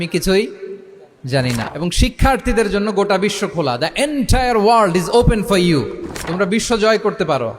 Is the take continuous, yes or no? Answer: no